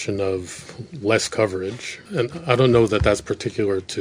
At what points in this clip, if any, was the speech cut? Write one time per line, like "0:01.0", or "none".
0:02.0